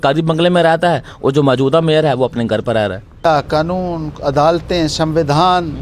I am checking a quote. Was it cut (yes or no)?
yes